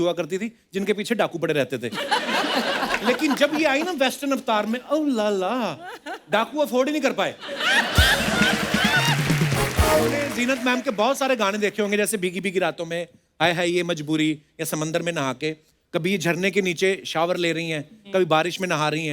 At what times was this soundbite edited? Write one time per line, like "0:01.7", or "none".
0:10.3